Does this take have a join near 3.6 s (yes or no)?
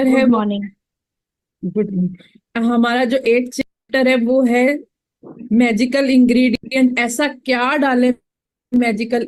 no